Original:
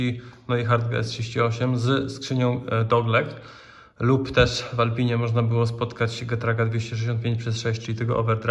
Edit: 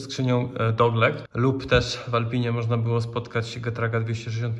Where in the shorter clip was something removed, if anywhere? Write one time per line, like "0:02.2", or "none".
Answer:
0:01.3